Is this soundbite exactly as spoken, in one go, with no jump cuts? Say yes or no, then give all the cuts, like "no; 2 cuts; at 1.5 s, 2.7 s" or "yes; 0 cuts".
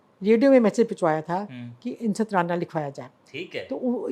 yes; 0 cuts